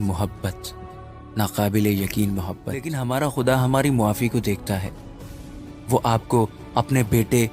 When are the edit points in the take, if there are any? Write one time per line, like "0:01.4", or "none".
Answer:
0:02.9